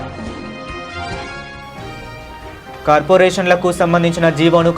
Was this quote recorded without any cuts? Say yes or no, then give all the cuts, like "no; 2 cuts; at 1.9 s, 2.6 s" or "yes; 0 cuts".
yes; 0 cuts